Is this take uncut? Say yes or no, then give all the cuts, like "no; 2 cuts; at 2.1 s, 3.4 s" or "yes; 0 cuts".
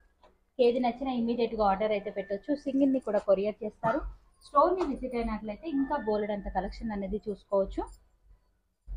yes; 0 cuts